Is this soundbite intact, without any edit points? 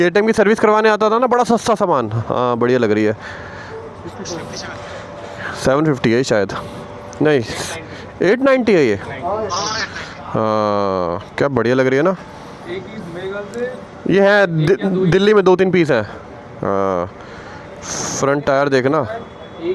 yes; 0 cuts

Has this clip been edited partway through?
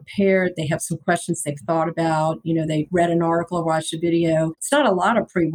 yes; 2 cuts; at 2.9 s, 4.6 s

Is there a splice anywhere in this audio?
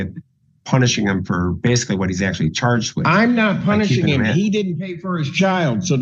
no; 0 cuts

